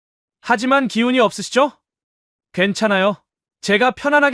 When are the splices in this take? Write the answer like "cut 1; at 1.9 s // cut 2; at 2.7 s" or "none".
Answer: none